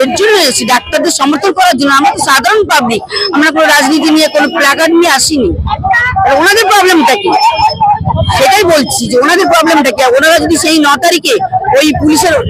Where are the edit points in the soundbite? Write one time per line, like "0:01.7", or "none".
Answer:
none